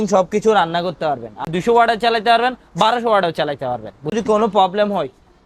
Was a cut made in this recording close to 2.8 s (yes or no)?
no